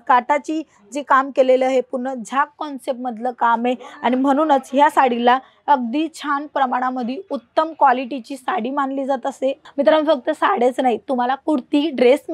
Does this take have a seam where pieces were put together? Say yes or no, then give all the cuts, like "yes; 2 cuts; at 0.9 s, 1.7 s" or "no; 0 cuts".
yes; 1 cut; at 9.6 s